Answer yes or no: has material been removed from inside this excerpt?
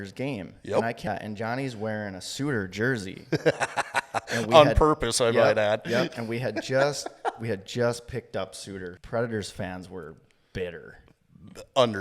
yes